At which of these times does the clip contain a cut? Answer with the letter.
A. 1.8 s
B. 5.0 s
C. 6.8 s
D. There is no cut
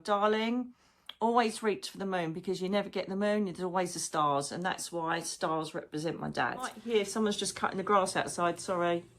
C